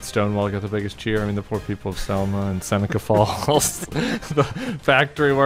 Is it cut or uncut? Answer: uncut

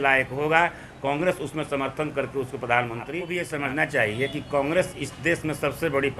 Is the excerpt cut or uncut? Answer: cut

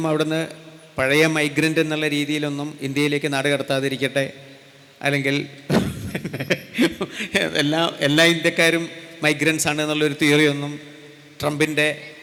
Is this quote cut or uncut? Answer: uncut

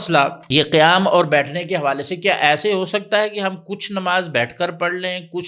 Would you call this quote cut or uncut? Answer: uncut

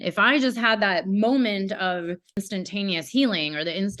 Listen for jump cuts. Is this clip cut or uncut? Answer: cut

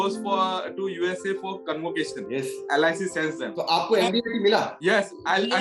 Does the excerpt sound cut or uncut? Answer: cut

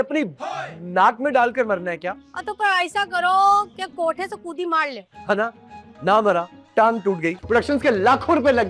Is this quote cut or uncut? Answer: cut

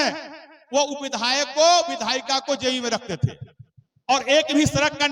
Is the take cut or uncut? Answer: uncut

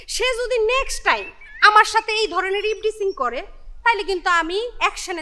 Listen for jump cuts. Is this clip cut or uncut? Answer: uncut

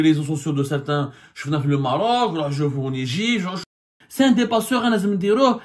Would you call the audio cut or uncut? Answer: cut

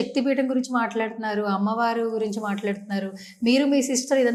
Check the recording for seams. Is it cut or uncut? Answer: uncut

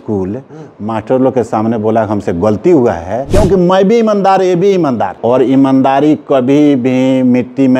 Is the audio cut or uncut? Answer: cut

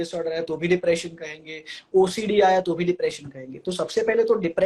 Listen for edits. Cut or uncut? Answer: uncut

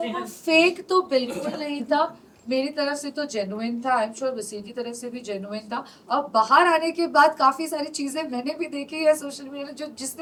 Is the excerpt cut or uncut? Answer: uncut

